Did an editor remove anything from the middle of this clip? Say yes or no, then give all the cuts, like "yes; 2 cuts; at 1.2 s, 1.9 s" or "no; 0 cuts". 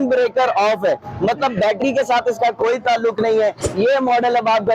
yes; 1 cut; at 3.6 s